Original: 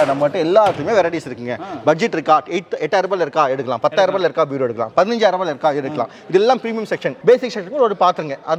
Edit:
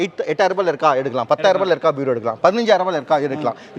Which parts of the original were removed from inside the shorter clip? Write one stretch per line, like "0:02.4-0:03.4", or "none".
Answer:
none